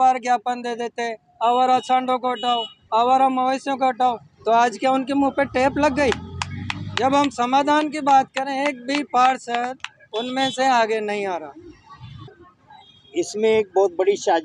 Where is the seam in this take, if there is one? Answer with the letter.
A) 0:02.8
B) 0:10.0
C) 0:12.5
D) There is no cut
C